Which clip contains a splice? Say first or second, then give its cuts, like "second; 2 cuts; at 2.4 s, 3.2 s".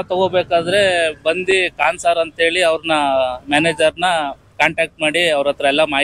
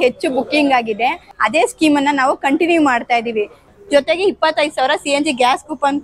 second; 2 cuts; at 1.3 s, 3.7 s